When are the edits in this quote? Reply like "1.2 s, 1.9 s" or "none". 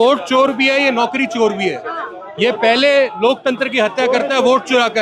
none